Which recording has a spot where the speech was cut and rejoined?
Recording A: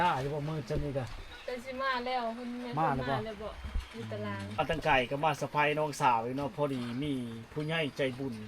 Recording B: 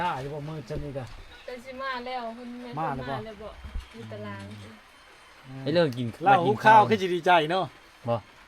A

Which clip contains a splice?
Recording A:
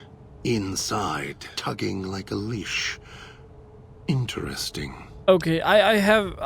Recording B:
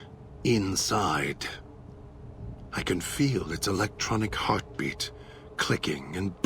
A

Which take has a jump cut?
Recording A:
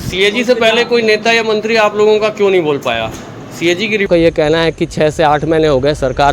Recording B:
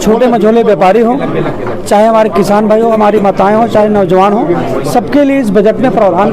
A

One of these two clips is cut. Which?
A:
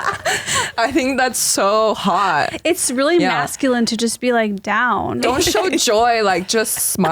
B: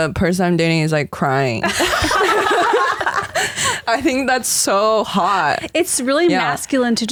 A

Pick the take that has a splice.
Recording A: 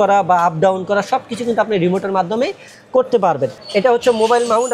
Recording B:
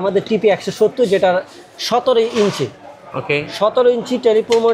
A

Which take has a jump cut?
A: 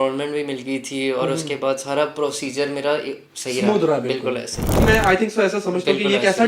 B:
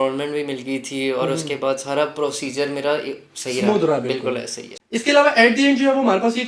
A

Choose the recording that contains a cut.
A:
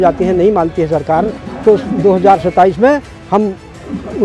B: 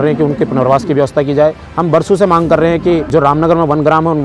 B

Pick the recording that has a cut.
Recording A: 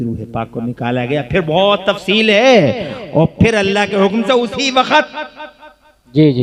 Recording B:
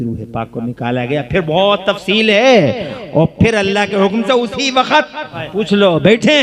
B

